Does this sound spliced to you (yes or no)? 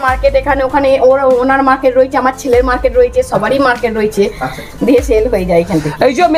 no